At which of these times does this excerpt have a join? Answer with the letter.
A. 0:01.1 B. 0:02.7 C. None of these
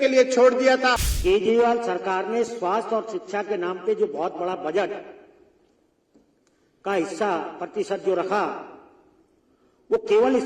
A